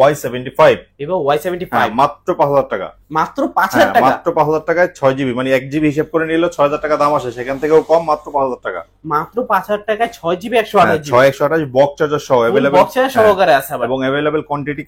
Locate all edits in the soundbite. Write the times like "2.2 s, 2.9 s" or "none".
none